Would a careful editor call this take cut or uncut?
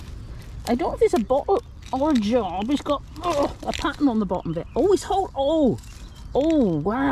uncut